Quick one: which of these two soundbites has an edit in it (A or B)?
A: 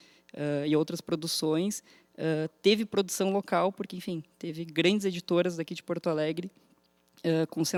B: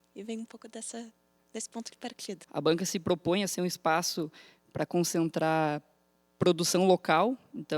B